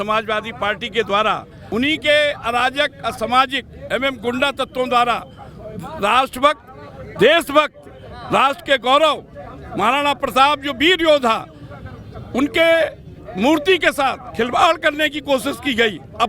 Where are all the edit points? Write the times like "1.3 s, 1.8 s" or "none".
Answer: 1.5 s